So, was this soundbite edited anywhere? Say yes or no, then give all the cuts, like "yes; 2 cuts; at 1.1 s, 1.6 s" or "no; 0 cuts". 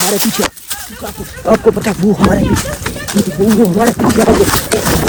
no; 0 cuts